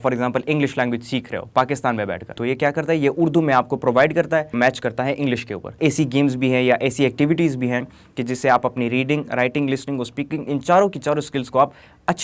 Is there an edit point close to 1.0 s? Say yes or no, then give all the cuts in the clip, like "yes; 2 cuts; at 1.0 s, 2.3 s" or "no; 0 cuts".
no; 3 cuts; at 2.3 s, 4.5 s, 5.8 s